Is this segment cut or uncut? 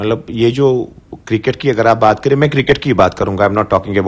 uncut